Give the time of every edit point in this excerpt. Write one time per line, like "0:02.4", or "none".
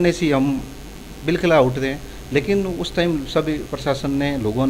none